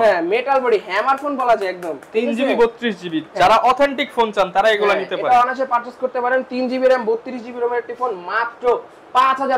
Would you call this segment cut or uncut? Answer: uncut